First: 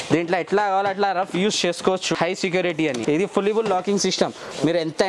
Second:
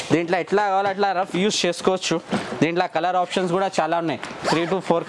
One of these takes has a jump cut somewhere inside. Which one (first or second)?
first